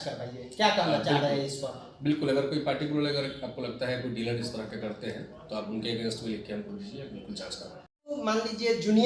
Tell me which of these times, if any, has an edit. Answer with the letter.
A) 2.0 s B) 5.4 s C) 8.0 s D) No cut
C